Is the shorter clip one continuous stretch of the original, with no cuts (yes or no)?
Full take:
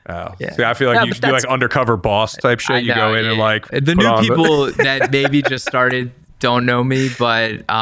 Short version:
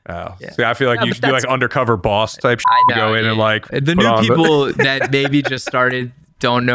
yes